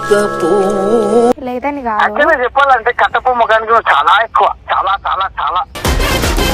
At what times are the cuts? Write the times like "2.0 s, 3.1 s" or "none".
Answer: 1.4 s

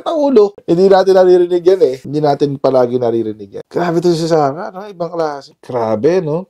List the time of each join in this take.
5.5 s

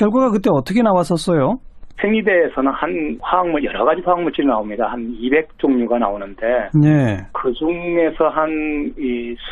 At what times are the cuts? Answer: 5.3 s

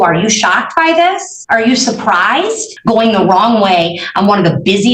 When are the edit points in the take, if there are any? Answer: 1.3 s, 2.7 s

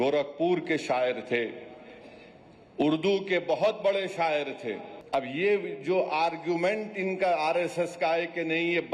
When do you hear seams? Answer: 4.9 s

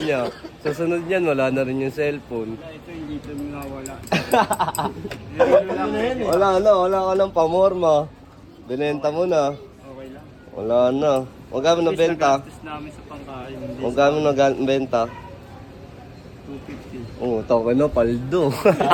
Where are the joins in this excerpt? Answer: none

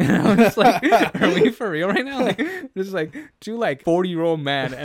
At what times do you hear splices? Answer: 3.8 s

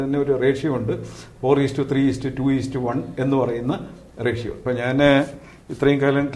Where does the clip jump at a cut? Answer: 4.5 s

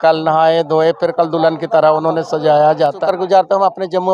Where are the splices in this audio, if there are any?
3.0 s

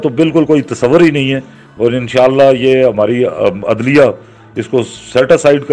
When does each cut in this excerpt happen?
none

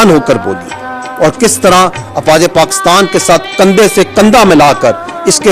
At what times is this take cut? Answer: none

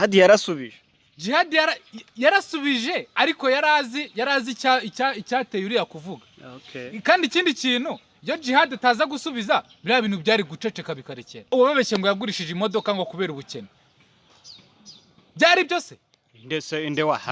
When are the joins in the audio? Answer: 11.3 s

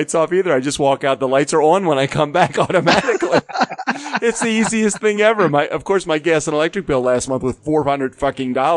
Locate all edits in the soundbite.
none

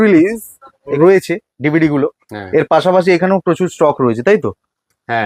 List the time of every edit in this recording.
0.9 s

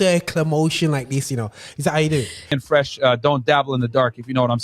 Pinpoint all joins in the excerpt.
2.5 s

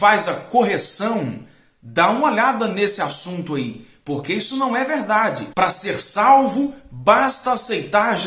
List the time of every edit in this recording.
5.5 s

